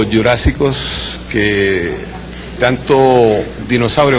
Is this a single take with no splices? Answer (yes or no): no